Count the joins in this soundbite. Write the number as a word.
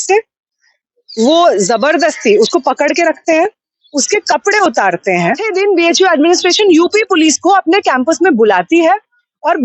one